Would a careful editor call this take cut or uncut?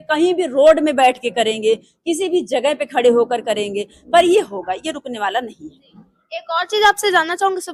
uncut